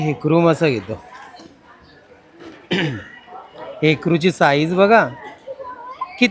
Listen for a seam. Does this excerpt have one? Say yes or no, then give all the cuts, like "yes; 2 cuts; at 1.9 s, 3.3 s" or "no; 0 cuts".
no; 0 cuts